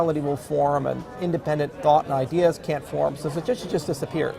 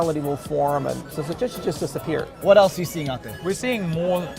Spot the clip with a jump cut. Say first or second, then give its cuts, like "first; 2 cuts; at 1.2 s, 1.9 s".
second; 3 cuts; at 1.1 s, 2.3 s, 3.3 s